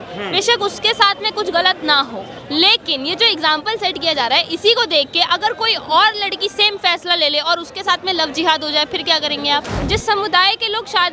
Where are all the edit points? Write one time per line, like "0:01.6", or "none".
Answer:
0:02.3
0:09.8